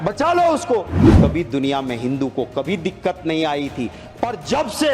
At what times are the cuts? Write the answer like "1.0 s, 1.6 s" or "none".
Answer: 1.0 s